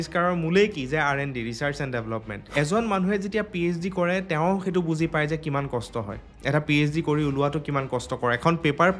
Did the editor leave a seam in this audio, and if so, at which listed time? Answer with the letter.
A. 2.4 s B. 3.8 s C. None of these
A